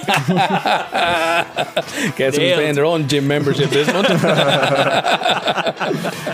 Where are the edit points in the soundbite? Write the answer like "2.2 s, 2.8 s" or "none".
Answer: none